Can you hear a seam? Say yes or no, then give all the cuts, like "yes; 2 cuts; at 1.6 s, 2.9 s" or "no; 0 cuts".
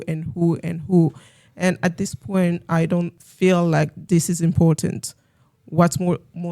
yes; 2 cuts; at 3.2 s, 4.0 s